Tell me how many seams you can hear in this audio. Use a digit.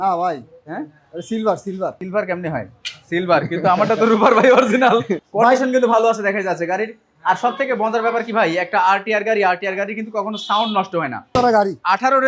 3